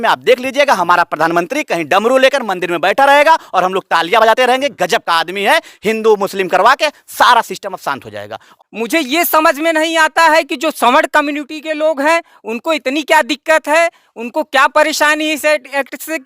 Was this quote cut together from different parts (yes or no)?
yes